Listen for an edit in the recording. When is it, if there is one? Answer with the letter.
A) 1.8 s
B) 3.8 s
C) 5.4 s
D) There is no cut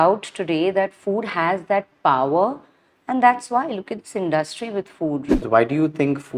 C